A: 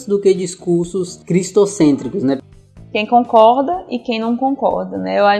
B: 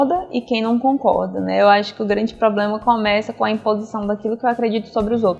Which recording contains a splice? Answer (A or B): A